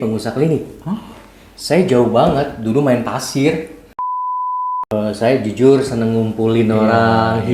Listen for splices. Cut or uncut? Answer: cut